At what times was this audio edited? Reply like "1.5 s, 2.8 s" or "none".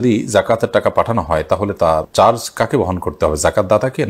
none